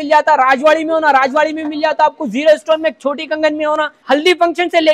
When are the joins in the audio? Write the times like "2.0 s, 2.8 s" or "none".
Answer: 3.9 s